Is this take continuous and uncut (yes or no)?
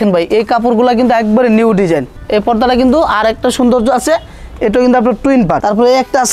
no